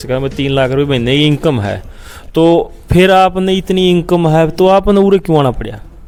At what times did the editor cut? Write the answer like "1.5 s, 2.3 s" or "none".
none